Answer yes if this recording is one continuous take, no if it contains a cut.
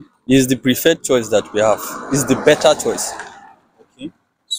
yes